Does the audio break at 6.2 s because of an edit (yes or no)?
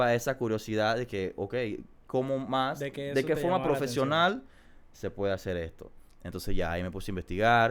no